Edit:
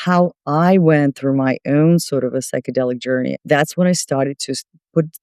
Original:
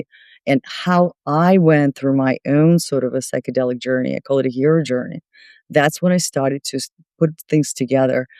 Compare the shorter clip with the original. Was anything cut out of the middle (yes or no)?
yes